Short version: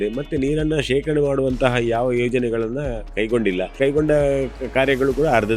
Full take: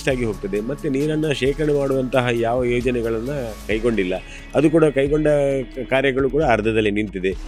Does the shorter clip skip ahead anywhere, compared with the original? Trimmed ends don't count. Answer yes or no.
yes